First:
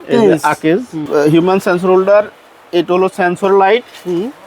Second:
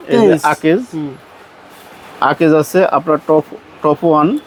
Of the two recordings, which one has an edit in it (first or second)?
first